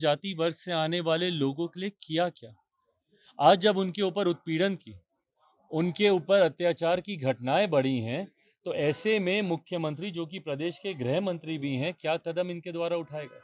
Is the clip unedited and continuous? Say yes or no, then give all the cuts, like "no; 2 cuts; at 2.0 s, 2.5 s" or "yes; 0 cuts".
yes; 0 cuts